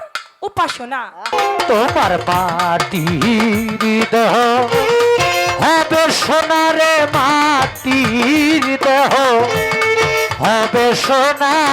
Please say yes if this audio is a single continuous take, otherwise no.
no